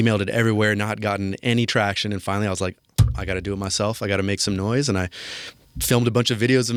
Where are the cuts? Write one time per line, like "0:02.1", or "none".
none